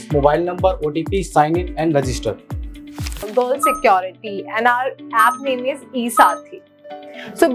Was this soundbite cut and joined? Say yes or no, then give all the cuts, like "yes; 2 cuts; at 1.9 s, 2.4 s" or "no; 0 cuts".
yes; 1 cut; at 3.3 s